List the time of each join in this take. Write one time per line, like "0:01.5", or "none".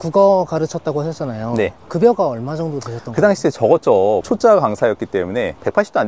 0:04.2